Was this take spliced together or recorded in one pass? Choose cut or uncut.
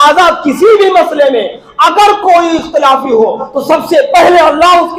uncut